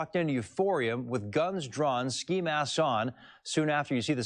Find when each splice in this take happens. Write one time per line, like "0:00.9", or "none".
none